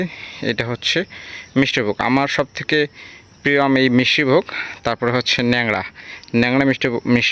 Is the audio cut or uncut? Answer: uncut